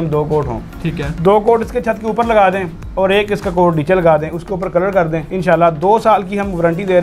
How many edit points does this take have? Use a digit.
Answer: 1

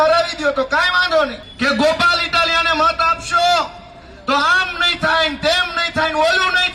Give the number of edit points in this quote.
1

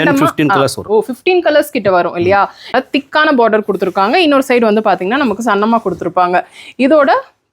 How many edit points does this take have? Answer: 1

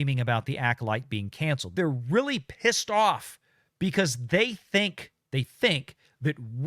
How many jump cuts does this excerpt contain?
1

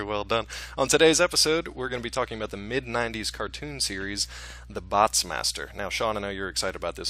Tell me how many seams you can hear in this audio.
0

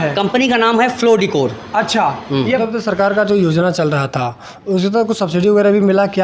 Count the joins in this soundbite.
1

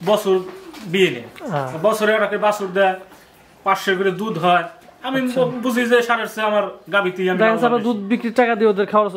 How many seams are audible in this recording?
0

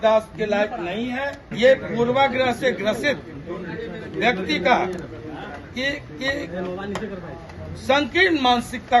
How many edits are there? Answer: 1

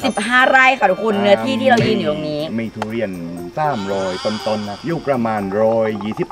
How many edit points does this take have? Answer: 0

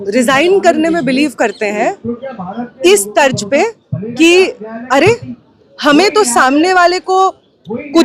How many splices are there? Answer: 0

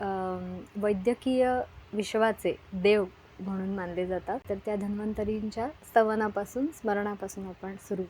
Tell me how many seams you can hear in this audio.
1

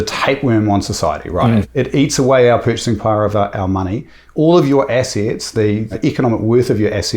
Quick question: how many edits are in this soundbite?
2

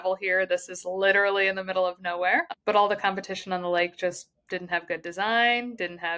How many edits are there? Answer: 1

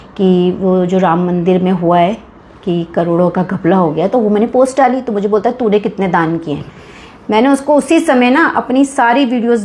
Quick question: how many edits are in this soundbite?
0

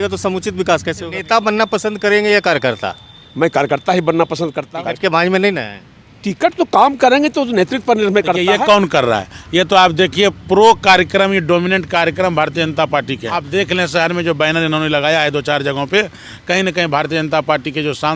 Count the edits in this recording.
4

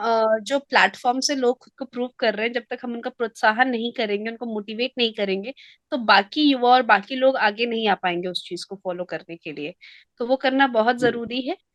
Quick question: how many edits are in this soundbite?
0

